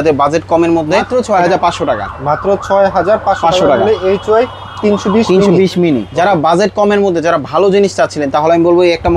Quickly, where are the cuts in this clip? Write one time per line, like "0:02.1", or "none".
0:01.1
0:06.1